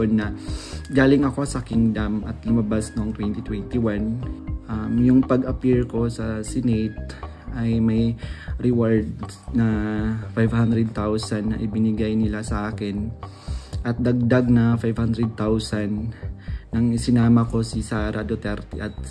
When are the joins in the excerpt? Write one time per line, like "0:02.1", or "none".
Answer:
0:04.3

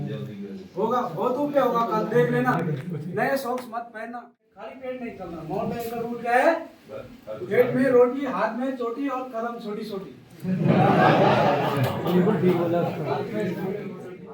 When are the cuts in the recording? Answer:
0:04.7

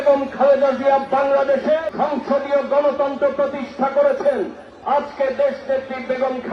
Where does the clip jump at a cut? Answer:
0:01.9
0:04.7

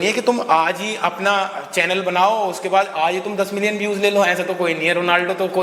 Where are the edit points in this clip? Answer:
none

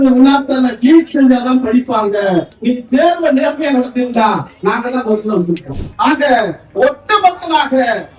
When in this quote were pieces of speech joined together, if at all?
0:02.5
0:05.8

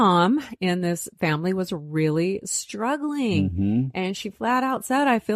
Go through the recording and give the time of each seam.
0:01.1

